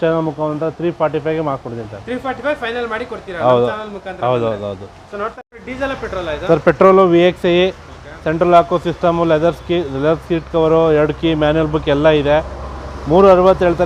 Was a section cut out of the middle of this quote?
yes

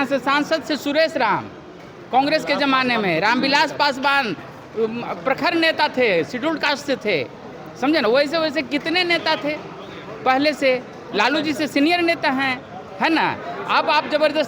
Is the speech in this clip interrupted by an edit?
no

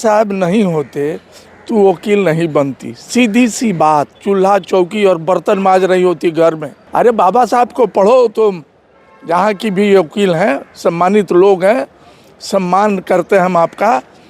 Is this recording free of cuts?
no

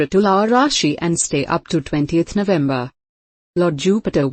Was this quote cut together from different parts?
yes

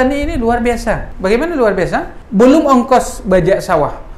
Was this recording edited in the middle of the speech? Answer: yes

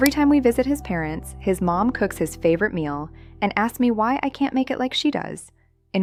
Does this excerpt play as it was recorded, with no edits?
yes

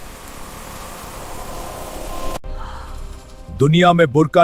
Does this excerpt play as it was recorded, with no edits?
no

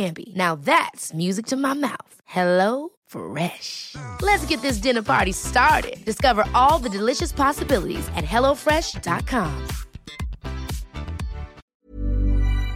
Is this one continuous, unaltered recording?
no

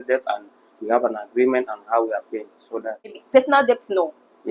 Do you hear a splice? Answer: yes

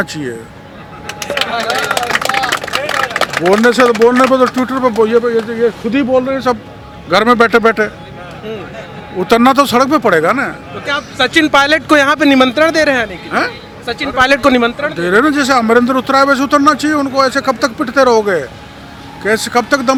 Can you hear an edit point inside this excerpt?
no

